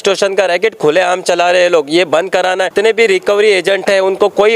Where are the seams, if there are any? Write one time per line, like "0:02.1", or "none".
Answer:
0:02.7